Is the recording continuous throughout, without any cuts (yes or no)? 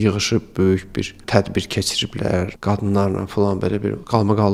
yes